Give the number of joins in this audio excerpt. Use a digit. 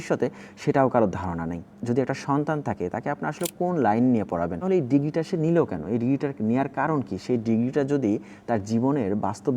2